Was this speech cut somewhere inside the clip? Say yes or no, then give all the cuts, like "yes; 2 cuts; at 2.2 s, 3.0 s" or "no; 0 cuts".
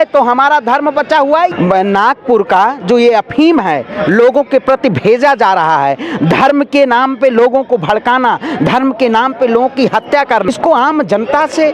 yes; 2 cuts; at 1.5 s, 10.5 s